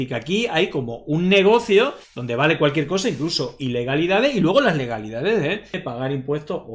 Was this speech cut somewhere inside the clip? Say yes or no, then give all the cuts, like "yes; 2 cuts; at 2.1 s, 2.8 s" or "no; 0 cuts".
yes; 1 cut; at 5.8 s